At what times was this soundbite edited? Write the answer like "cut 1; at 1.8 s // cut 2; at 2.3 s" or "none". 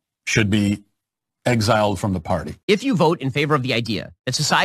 cut 1; at 2.5 s